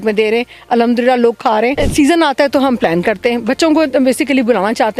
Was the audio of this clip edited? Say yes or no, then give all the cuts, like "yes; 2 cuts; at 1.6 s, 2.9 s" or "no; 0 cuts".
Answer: yes; 1 cut; at 1.8 s